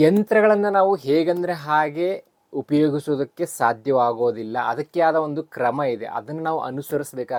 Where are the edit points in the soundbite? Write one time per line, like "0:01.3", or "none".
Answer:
none